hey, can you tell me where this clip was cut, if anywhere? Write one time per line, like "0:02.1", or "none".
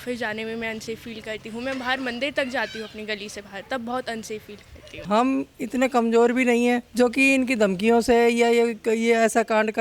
0:05.0
0:06.9